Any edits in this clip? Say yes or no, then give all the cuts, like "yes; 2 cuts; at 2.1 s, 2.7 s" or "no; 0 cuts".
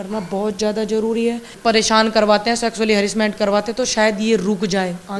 yes; 1 cut; at 1.5 s